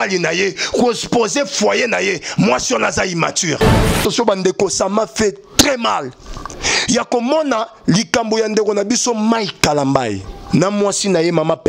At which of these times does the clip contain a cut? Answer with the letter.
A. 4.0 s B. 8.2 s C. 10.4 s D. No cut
A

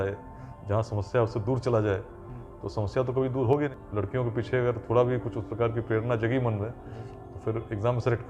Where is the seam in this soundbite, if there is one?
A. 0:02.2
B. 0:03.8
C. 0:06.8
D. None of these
B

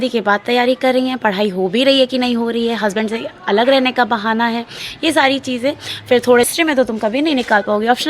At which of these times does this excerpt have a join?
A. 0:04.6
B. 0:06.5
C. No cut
B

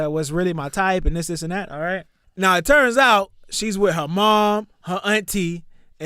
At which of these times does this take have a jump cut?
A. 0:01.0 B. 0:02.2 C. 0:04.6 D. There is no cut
B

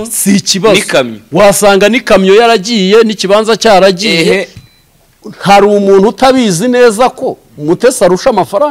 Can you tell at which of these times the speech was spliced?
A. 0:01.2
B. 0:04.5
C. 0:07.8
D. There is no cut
B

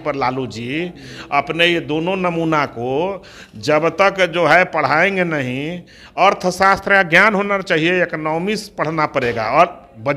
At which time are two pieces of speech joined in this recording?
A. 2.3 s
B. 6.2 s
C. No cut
C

